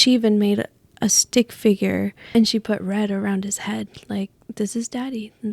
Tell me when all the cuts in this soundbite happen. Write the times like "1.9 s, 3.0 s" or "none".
2.3 s